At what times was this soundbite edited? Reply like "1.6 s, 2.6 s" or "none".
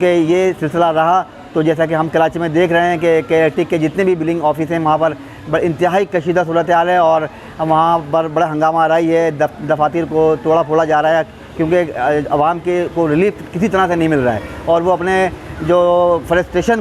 none